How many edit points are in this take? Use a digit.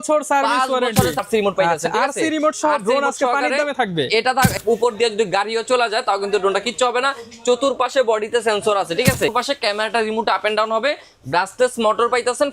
3